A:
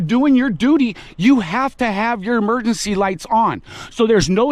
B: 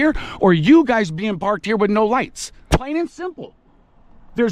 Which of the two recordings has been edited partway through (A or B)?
B